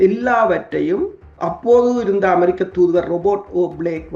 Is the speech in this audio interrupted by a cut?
no; 0 cuts

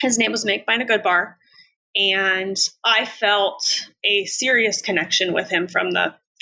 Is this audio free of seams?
no; 1 cut; at 2.7 s

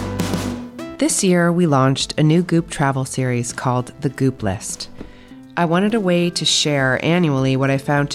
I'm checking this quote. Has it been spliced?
yes; 1 cut; at 0.9 s

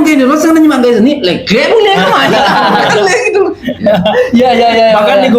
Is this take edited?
no; 0 cuts

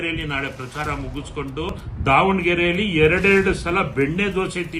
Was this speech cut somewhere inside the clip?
yes; 1 cut; at 1.7 s

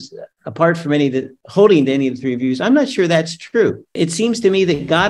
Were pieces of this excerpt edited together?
yes; 1 cut; at 3.9 s

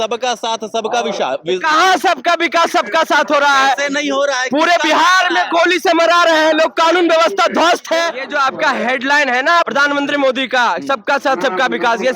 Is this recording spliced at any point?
yes; 2 cuts; at 8.2 s, 9.7 s

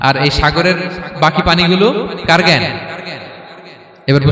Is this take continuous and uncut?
yes; 0 cuts

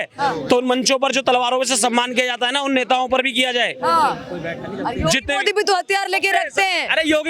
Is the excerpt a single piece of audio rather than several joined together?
yes; 0 cuts

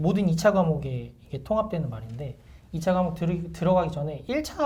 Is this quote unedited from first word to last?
yes; 0 cuts

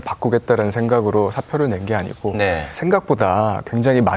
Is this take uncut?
no; 1 cut; at 2.7 s

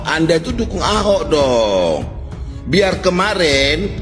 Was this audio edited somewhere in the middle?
no; 0 cuts

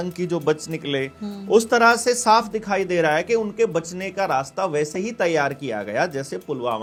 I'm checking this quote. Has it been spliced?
no; 0 cuts

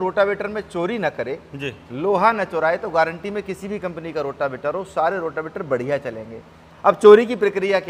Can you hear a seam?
no; 0 cuts

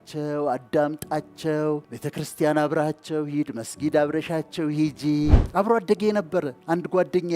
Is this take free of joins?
no; 2 cuts; at 2.0 s, 5.4 s

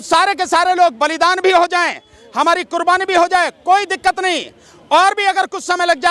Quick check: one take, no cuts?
yes; 0 cuts

